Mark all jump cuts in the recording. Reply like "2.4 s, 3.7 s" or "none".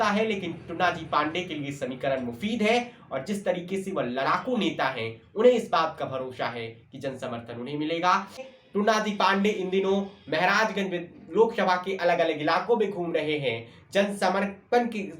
8.5 s